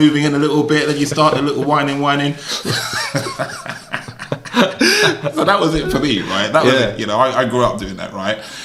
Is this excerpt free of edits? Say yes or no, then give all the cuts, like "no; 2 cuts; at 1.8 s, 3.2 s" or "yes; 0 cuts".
yes; 0 cuts